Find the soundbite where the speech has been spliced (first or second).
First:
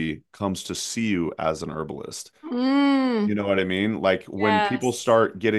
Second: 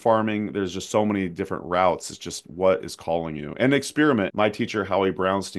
second